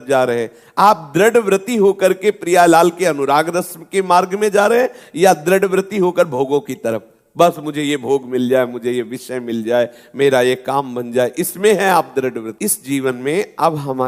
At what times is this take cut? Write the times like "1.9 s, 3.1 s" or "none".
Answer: 12.5 s

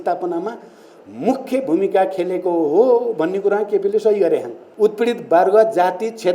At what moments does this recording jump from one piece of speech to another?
4.6 s

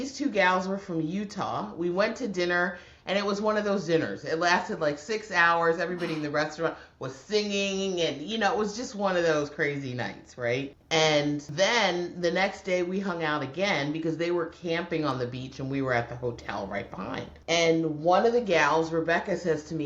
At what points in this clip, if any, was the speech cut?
10.8 s, 11.5 s, 17.3 s

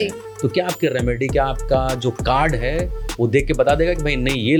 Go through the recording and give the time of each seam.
none

